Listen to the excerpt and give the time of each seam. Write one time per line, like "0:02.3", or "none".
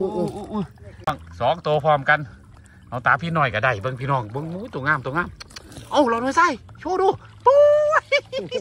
0:01.0